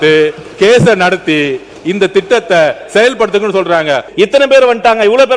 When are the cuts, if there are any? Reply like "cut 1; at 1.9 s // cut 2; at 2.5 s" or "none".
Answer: cut 1; at 4.1 s